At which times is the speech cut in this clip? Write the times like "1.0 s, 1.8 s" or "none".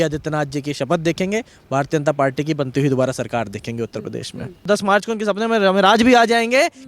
4.6 s